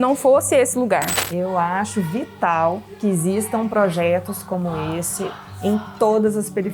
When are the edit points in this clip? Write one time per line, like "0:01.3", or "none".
0:01.2